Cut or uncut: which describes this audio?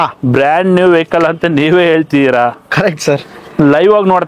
uncut